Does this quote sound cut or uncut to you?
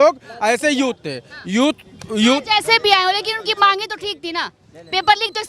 uncut